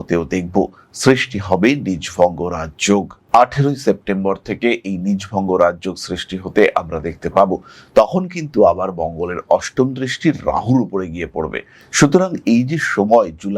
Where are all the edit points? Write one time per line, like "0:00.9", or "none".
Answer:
none